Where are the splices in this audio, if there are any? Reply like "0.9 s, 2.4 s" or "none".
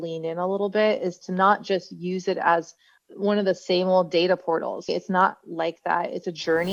none